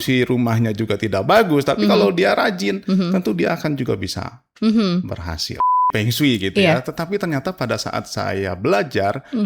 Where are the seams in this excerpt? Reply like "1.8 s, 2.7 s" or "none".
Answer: 5.8 s